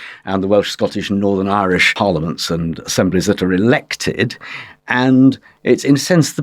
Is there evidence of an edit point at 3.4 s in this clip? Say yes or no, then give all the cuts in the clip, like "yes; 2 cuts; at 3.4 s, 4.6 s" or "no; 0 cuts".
no; 1 cut; at 1.9 s